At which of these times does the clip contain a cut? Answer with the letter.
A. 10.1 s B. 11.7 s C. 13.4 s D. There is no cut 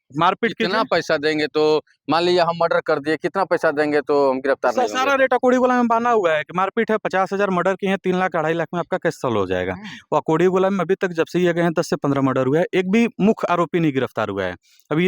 D